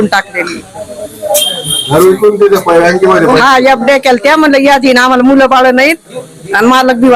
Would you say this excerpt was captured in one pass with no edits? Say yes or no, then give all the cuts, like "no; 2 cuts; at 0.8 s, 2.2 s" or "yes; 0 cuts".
yes; 0 cuts